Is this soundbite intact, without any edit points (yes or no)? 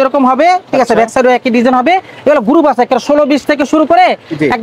yes